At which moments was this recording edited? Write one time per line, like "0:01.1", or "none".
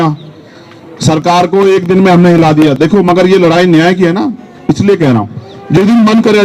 none